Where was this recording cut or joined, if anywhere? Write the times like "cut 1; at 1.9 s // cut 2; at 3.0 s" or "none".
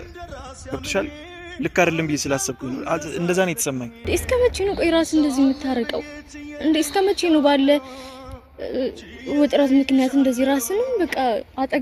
cut 1; at 3.9 s